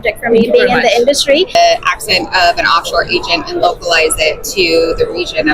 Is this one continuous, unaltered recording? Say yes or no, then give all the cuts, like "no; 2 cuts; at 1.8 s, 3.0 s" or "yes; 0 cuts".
no; 1 cut; at 1.5 s